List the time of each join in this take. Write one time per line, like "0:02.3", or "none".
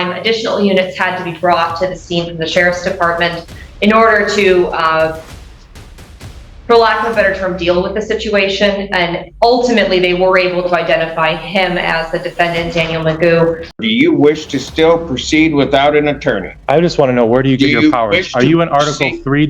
0:13.8